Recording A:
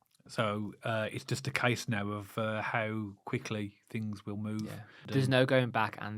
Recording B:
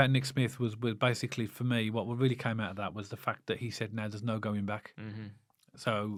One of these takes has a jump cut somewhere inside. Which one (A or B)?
A